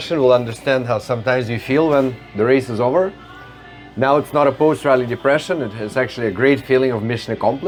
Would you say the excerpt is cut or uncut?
uncut